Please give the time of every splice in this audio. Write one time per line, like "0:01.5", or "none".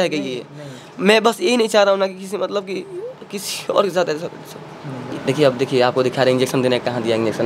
0:05.1

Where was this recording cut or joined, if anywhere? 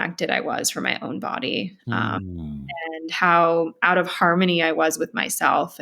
none

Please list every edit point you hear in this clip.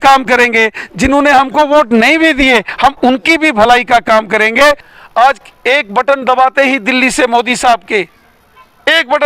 0:04.9

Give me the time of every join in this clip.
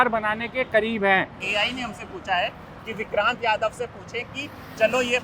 0:01.4

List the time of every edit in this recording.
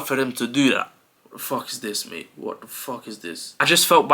0:01.2

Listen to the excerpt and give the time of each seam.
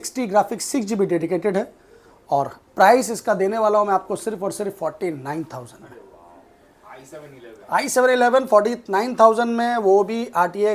none

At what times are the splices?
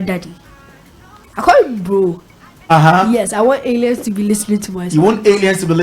0:02.5

